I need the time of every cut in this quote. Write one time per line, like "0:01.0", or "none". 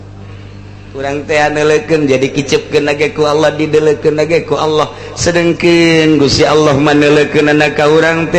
0:01.0